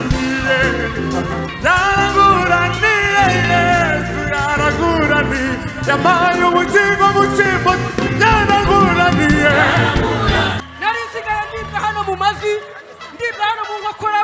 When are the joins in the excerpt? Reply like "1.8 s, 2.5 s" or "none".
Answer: 10.6 s